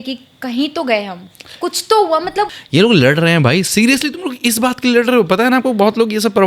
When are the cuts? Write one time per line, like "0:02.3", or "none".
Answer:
0:02.6